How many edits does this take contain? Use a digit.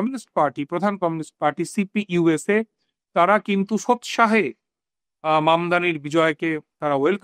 0